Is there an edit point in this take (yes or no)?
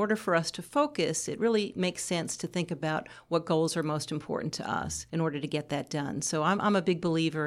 yes